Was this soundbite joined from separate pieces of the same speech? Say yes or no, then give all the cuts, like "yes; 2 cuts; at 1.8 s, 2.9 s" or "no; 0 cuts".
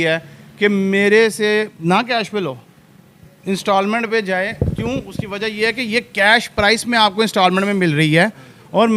no; 0 cuts